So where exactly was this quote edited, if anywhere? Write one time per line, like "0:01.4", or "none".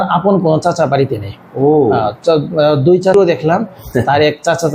0:03.1